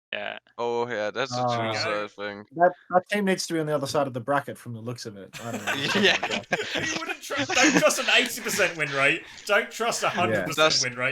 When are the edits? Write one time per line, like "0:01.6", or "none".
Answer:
none